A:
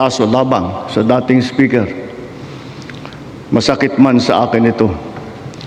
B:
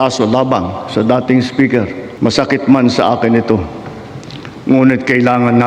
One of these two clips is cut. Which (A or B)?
B